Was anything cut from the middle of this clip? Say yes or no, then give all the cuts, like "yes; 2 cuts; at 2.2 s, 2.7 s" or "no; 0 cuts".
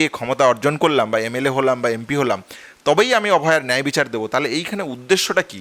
no; 0 cuts